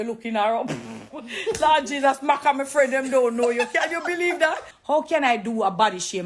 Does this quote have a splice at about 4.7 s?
yes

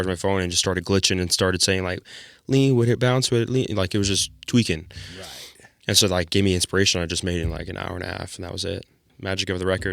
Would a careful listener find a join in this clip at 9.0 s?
yes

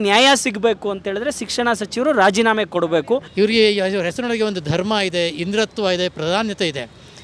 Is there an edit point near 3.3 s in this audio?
yes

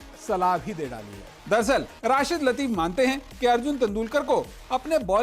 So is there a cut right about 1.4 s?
yes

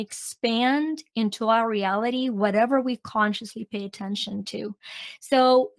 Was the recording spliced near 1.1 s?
no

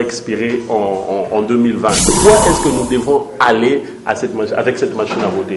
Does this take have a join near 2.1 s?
yes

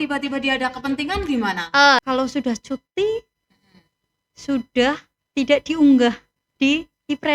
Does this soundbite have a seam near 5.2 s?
no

